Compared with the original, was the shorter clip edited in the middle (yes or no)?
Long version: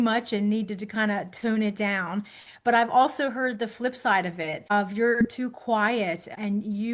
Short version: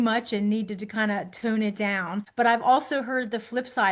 yes